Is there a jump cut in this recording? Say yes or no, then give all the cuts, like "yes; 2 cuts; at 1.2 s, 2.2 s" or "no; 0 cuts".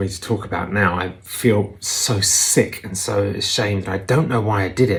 no; 0 cuts